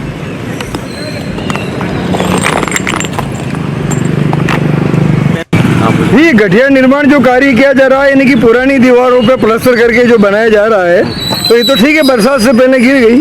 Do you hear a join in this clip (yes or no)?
yes